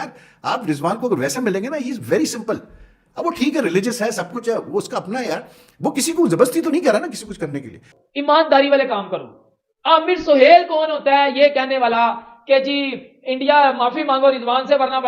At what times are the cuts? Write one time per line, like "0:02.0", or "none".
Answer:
0:08.1